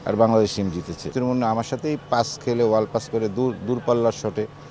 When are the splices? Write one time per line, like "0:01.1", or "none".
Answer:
0:01.1